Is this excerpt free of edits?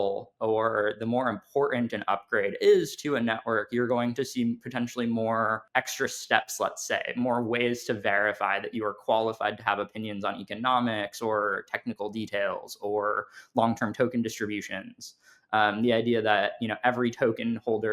no; 1 cut; at 5.6 s

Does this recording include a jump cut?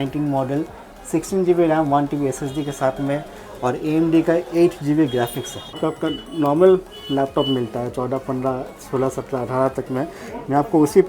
yes; 1 cut; at 5.8 s

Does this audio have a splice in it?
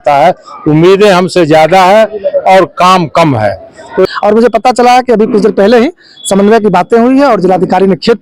yes; 1 cut; at 4.0 s

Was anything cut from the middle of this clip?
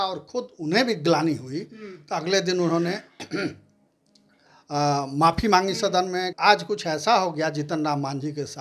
yes; 1 cut; at 6.3 s

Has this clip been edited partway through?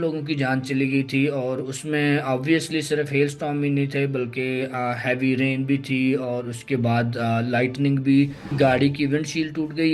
yes; 1 cut; at 8.5 s

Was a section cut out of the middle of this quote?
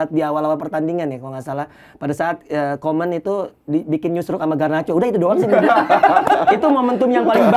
no; 0 cuts

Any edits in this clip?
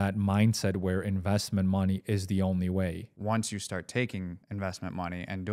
yes; 2 cuts; at 3.1 s, 4.4 s

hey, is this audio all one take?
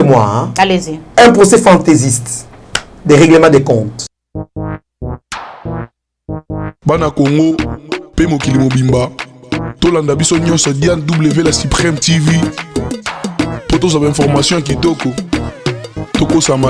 no; 2 cuts; at 1.0 s, 4.1 s

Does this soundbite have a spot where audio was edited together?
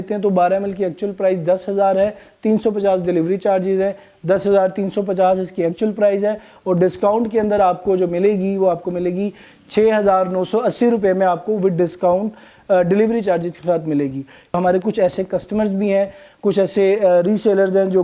no; 0 cuts

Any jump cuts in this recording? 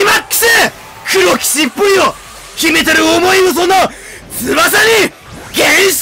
no; 0 cuts

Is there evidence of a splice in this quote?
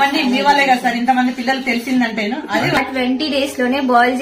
yes; 1 cut; at 2.8 s

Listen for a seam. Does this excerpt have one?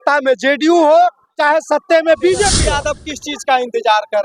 yes; 1 cut; at 2.6 s

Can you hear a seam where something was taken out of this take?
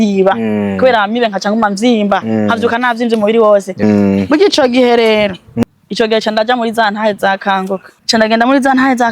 yes; 3 cuts; at 3.8 s, 5.7 s, 7.9 s

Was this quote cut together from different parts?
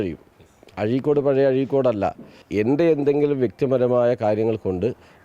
yes; 1 cut; at 2.4 s

